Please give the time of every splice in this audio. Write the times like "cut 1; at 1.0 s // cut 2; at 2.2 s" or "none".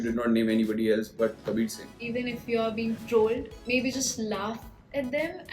cut 1; at 1.9 s // cut 2; at 3.5 s

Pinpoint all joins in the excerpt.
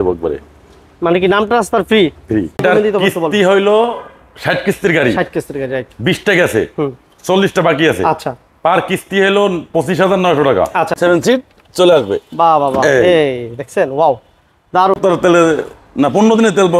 cut 1; at 2.6 s // cut 2; at 11.0 s // cut 3; at 15.0 s

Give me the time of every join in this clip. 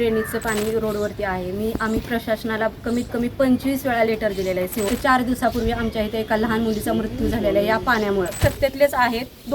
cut 1; at 4.9 s // cut 2; at 8.4 s

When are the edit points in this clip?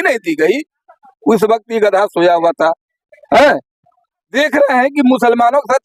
none

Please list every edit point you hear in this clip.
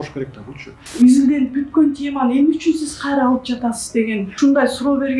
cut 1; at 0.9 s // cut 2; at 4.3 s

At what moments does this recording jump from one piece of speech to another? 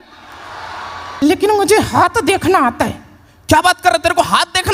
cut 1; at 1.1 s

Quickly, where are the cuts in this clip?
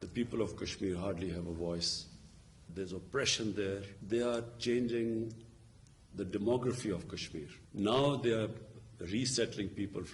cut 1; at 3.9 s

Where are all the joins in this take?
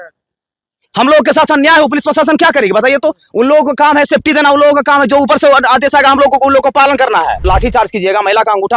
cut 1; at 7.4 s

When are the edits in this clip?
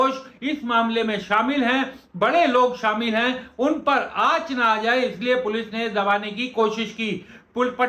none

